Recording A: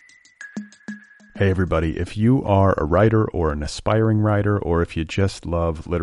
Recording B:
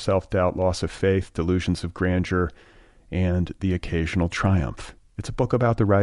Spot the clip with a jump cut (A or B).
A